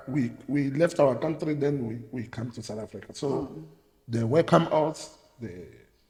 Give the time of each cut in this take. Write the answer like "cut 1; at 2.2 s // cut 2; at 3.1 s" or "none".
none